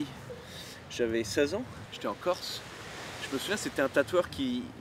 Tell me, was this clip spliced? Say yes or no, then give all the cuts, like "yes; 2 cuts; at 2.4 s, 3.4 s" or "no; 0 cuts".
no; 0 cuts